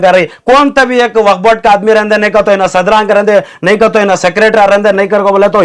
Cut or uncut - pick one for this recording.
uncut